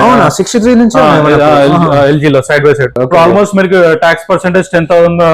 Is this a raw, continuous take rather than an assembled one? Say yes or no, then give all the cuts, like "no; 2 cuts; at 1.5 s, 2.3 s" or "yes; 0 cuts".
no; 1 cut; at 3.0 s